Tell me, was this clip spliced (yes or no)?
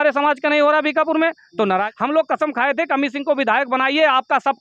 yes